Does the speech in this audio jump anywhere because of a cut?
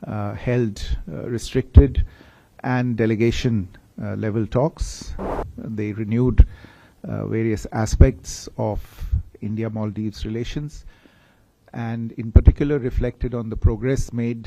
yes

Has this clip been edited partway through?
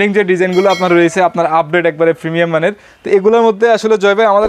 yes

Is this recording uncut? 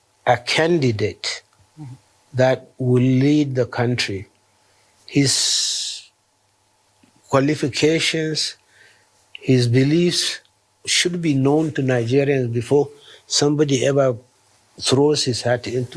yes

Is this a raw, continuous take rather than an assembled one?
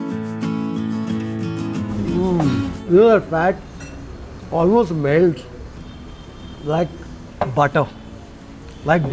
yes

